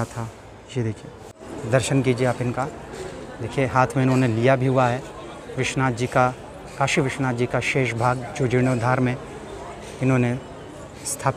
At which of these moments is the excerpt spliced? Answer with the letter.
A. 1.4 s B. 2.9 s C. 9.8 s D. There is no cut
A